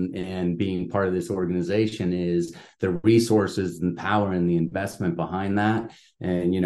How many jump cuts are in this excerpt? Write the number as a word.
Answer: zero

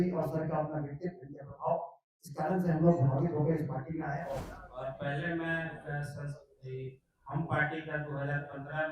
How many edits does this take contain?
one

